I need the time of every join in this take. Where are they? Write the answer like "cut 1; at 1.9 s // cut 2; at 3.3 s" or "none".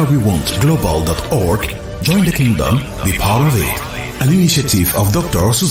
none